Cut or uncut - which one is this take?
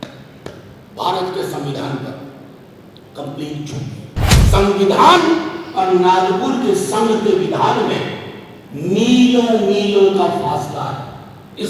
cut